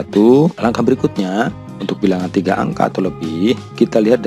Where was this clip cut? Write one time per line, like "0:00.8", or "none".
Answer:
none